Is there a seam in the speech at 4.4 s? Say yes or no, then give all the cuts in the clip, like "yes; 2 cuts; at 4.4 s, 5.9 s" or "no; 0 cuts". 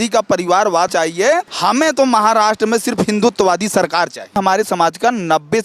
yes; 2 cuts; at 1.0 s, 4.4 s